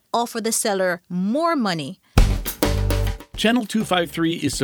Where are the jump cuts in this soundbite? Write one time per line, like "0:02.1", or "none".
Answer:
0:02.1